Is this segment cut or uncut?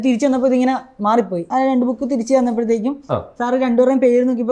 cut